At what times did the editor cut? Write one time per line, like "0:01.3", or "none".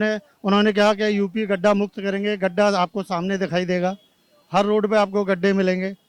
none